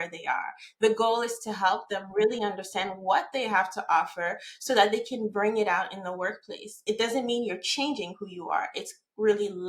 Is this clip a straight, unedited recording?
yes; 0 cuts

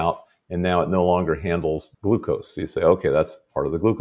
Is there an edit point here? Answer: yes; 1 cut; at 1.9 s

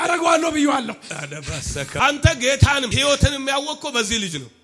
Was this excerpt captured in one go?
yes; 0 cuts

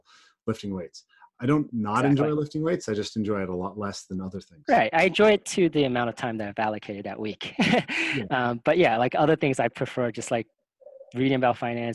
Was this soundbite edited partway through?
no; 0 cuts

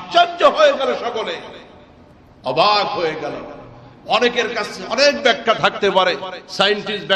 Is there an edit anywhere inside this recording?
no; 0 cuts

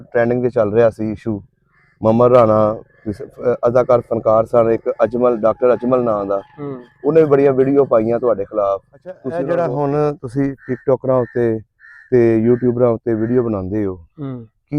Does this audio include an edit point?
yes; 1 cut; at 9.3 s

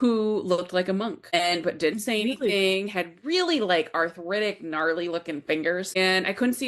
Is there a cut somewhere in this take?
yes; 2 cuts; at 1.3 s, 6.0 s

